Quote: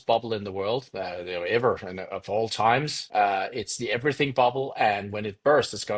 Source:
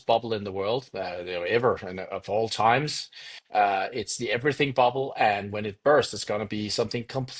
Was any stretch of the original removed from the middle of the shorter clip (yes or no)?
yes